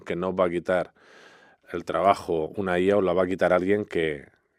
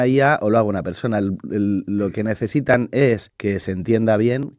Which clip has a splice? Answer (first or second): second